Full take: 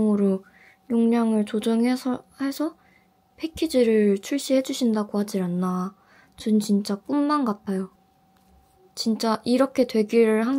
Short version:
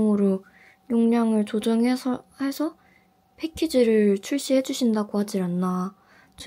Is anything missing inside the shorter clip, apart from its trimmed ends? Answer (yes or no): no